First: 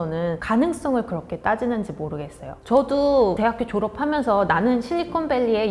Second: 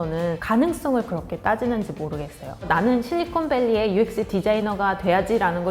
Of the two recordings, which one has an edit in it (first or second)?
second